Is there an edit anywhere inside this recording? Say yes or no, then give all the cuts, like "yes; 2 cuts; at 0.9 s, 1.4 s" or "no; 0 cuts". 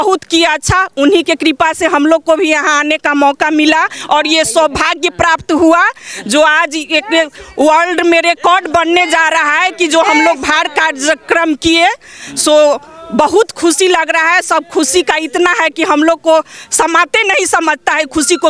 no; 0 cuts